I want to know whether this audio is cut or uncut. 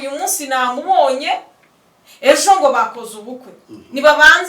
uncut